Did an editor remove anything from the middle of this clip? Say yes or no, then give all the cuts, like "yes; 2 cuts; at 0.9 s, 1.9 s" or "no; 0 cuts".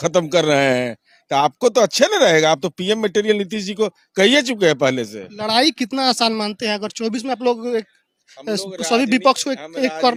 no; 0 cuts